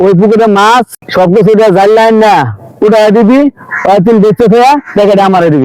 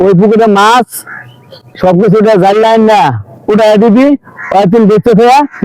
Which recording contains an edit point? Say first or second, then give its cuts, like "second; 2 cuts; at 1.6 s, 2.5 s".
first; 1 cut; at 1.0 s